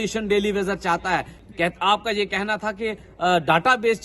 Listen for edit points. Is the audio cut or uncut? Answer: cut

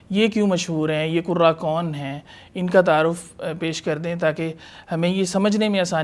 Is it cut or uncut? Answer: uncut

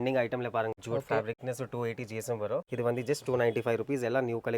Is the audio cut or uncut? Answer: cut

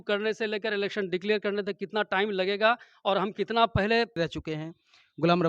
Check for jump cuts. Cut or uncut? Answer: cut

